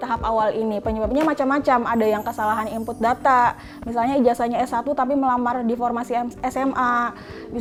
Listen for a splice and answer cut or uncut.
uncut